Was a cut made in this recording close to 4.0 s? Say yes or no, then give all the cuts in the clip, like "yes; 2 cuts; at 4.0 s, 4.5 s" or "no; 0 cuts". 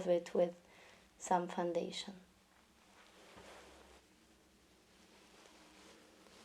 yes; 1 cut; at 4.0 s